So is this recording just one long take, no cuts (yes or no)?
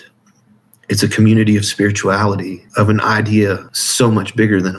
no